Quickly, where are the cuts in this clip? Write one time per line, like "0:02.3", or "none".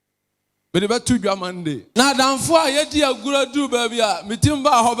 0:01.8